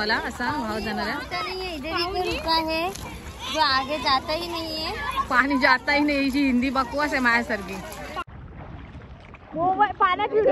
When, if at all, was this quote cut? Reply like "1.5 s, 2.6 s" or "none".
8.2 s